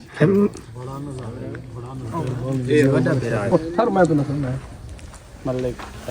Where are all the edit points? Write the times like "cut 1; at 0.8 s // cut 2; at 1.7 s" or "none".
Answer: cut 1; at 3.5 s